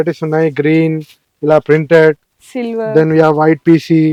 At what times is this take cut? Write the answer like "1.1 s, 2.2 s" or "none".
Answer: none